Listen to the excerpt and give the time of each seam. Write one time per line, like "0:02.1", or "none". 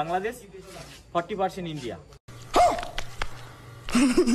0:02.2